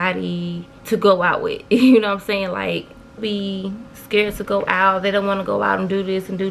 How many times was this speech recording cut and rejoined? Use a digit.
1